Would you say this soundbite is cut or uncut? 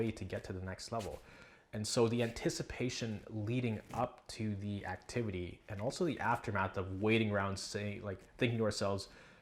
uncut